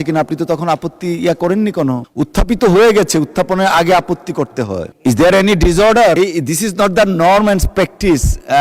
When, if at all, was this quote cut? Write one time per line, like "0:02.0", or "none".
0:02.1
0:04.9
0:06.2